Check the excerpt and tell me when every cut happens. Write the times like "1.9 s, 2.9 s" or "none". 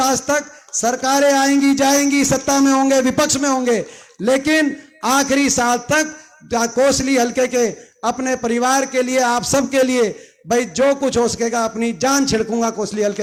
none